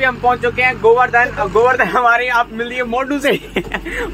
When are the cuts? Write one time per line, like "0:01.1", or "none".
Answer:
none